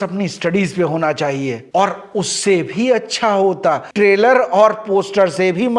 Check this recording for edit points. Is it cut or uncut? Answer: cut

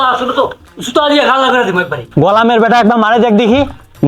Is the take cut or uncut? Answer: cut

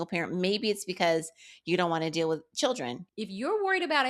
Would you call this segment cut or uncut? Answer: cut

